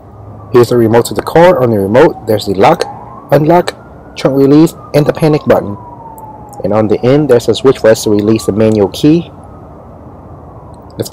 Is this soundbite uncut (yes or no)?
no